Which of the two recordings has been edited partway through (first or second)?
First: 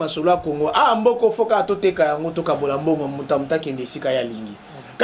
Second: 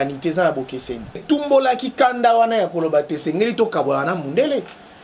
second